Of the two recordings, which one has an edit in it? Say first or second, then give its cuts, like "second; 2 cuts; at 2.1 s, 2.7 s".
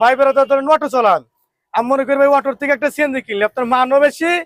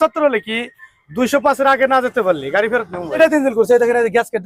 second; 1 cut; at 3.2 s